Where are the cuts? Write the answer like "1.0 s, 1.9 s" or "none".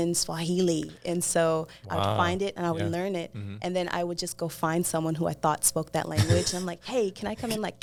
none